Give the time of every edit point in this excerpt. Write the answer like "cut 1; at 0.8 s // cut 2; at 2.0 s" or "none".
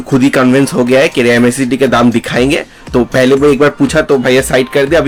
none